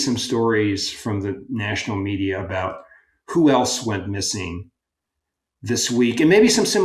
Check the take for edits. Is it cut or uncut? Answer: uncut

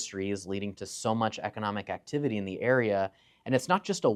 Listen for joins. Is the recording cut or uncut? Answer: uncut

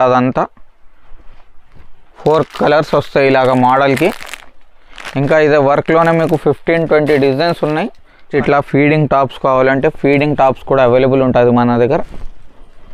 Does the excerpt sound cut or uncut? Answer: cut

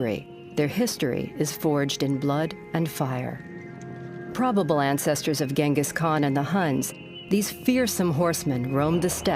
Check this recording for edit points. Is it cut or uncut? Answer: cut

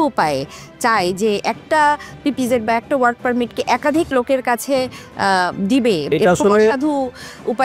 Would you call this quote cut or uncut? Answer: cut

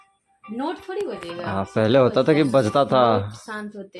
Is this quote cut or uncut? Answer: uncut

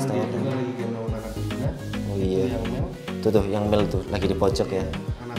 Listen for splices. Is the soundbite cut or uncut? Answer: uncut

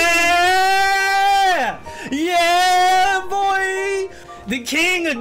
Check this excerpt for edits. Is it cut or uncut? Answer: cut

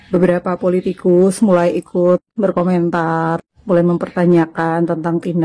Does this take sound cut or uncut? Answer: uncut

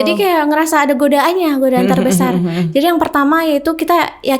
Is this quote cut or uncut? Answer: uncut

